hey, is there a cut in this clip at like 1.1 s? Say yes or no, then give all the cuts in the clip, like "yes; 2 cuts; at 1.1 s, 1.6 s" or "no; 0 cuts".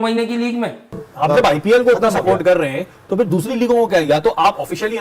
yes; 1 cut; at 1.1 s